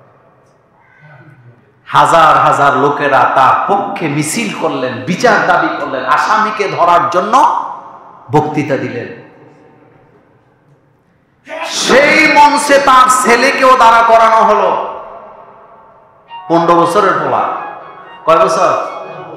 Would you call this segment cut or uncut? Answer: uncut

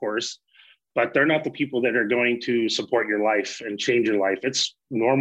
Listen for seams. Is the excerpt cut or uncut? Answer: uncut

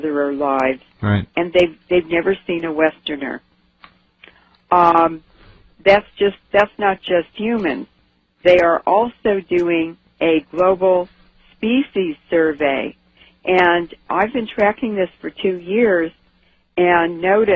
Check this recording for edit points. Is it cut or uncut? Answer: cut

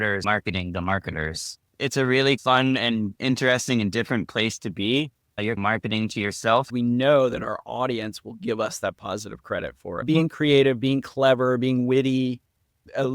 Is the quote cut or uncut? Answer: cut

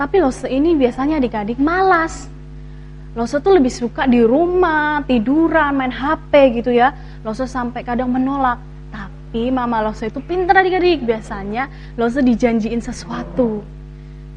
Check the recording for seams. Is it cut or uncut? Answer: uncut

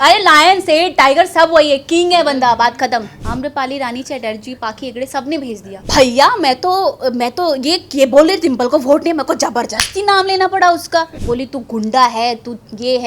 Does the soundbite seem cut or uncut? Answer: cut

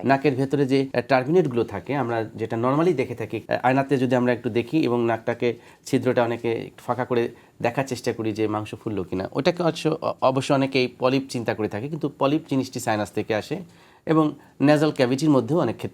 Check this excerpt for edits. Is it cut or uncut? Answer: cut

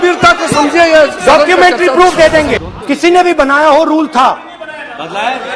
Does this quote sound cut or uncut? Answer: cut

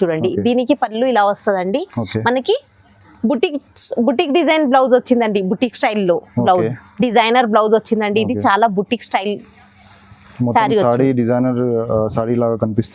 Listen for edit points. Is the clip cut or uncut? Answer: uncut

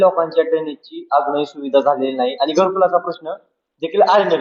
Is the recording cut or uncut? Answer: uncut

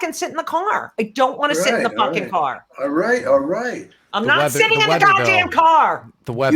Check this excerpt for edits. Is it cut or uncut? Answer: uncut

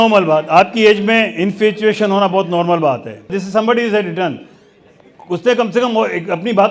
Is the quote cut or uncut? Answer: cut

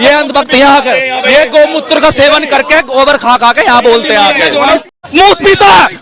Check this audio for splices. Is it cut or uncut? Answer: cut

